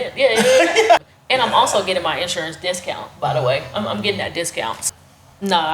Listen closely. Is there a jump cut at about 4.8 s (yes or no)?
yes